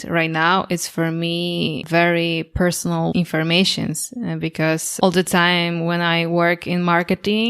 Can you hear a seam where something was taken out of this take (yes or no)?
yes